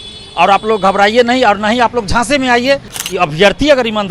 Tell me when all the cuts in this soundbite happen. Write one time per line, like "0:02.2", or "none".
0:03.0